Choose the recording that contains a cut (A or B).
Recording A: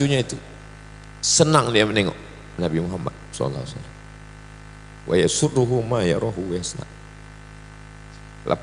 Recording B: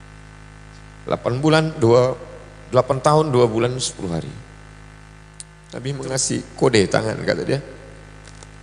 B